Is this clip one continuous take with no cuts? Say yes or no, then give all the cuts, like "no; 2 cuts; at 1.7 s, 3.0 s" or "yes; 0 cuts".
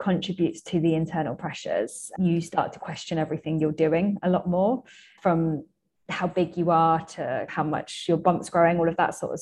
no; 3 cuts; at 2.0 s, 5.2 s, 7.5 s